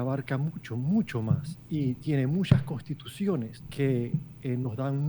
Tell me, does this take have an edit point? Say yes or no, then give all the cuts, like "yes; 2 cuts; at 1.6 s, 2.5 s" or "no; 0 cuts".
yes; 2 cuts; at 1.5 s, 3.6 s